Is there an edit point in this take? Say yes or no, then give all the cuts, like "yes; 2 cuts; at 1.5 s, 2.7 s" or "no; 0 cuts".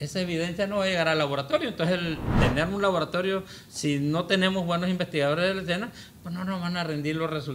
yes; 1 cut; at 2.3 s